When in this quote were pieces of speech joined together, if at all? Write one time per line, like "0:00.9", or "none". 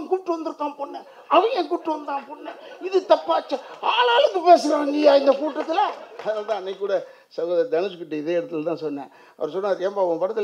0:06.1